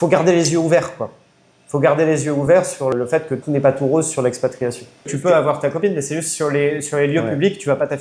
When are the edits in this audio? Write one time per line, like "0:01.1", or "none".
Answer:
0:02.9
0:05.1